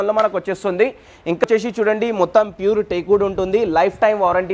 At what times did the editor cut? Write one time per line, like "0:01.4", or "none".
0:01.4